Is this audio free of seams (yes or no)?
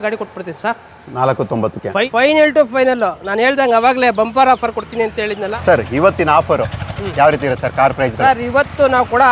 no